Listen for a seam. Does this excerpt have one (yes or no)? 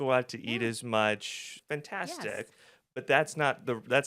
yes